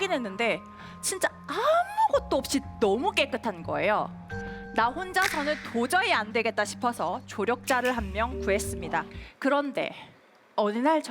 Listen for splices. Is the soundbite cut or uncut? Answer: cut